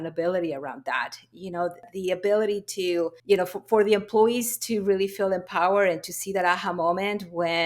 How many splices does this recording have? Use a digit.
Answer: 2